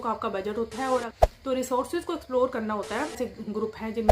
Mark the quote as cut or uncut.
cut